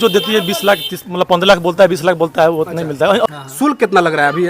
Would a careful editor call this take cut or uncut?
cut